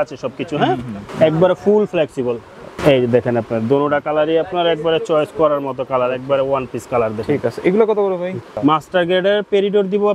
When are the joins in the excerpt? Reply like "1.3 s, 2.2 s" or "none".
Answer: 1.0 s, 2.6 s, 8.6 s